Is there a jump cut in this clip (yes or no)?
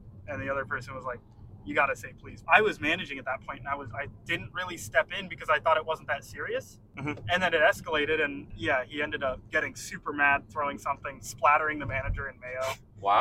yes